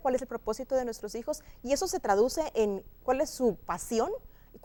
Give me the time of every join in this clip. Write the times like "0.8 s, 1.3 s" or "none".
none